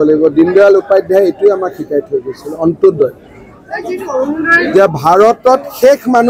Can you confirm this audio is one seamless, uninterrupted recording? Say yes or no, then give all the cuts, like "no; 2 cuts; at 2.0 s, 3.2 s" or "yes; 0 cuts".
yes; 0 cuts